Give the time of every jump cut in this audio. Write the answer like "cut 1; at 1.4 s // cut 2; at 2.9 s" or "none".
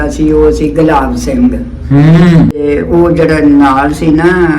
cut 1; at 2.6 s